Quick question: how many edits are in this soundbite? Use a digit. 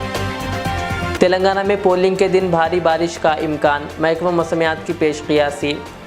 1